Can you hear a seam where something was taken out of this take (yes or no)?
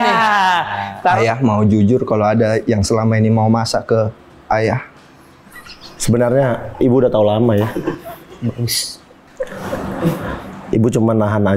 yes